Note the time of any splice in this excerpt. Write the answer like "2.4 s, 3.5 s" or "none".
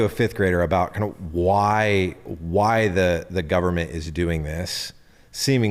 none